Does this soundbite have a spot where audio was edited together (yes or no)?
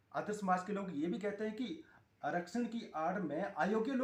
no